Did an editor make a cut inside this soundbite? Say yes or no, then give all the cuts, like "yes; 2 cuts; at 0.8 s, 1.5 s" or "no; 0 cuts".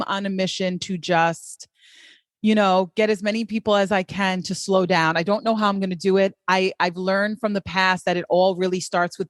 no; 0 cuts